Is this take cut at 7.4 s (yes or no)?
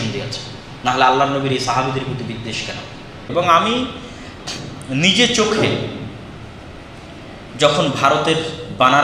no